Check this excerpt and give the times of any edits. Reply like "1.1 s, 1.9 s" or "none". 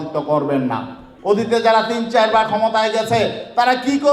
1.1 s